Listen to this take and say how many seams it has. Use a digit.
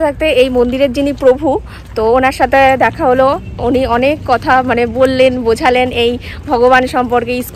0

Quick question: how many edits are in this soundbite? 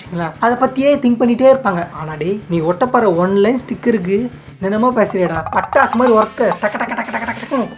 2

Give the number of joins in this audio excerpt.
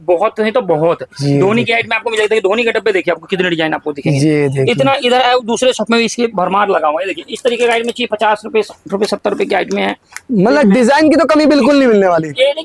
0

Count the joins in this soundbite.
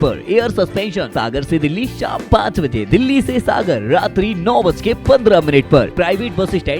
2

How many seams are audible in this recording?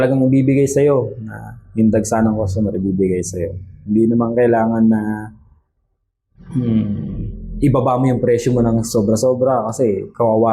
0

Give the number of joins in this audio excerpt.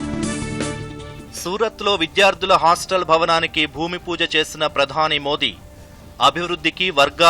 1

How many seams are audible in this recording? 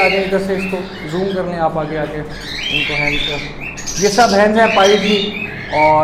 0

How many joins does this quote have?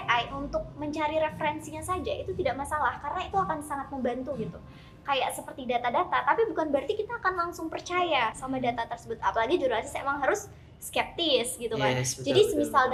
0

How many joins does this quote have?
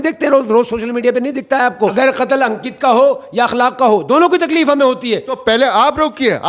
2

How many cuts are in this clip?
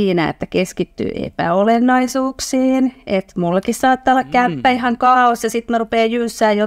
0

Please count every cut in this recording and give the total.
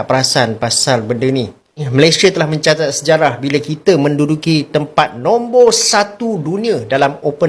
1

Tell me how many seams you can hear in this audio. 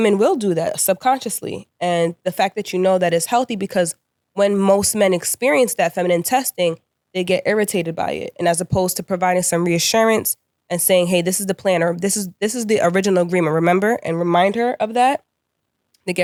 0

